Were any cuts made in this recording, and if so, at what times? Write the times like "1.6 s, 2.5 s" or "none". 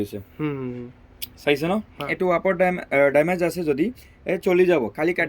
2.4 s